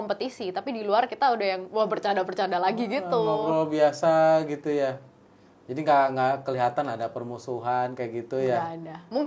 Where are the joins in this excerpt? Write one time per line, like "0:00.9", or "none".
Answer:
none